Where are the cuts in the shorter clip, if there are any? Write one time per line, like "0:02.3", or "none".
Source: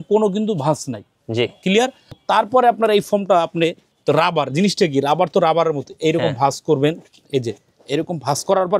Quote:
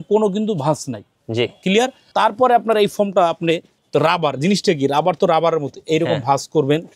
0:02.0

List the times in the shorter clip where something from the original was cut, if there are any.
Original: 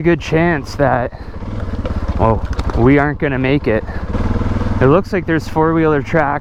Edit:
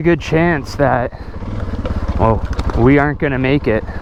none

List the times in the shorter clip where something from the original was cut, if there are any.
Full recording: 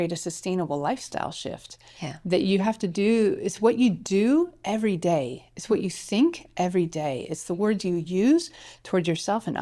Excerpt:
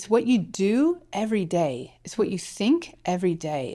none

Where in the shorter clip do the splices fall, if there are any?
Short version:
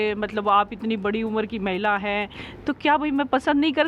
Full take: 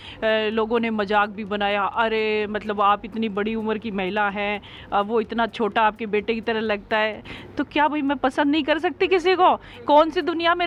0:02.4

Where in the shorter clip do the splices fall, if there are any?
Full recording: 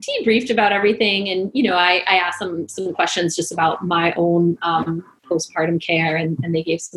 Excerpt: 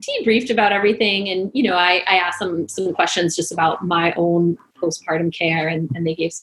0:04.6

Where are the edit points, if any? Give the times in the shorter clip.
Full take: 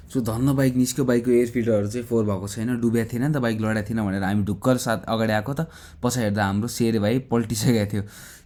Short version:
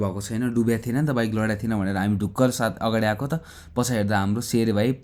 none

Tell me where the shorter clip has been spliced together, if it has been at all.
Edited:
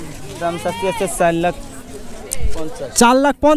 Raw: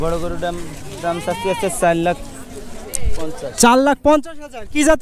none

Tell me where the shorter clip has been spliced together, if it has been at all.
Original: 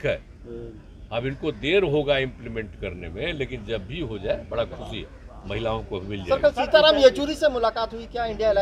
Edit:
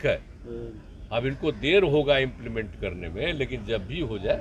none

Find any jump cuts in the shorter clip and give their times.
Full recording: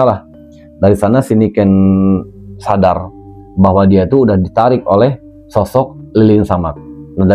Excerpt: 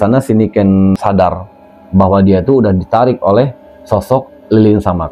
0:01.0

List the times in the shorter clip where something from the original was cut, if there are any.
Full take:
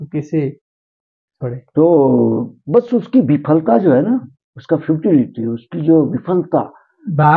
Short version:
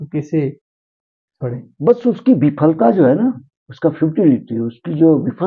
0:01.6

